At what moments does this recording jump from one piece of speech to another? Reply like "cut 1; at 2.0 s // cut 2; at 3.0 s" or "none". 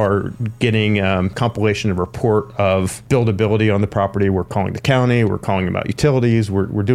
cut 1; at 1.4 s // cut 2; at 3.0 s